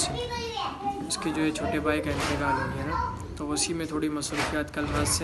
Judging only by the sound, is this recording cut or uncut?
uncut